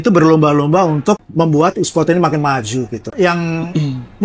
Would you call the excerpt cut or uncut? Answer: cut